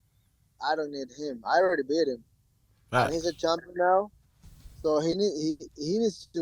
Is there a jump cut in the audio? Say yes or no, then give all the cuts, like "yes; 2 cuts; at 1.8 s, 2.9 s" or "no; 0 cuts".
no; 0 cuts